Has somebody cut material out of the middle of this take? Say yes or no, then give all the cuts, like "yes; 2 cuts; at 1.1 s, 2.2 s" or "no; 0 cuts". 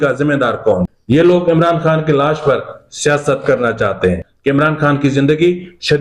yes; 2 cuts; at 0.9 s, 4.3 s